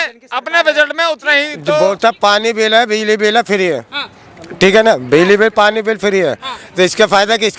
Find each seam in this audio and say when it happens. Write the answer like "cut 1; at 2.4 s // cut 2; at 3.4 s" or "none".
cut 1; at 1.8 s